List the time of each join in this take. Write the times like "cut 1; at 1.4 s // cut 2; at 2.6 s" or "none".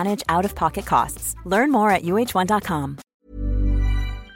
cut 1; at 3.0 s